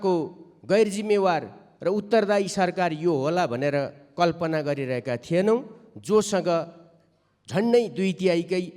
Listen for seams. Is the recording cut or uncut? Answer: uncut